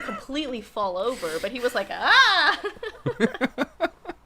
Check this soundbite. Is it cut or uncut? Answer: cut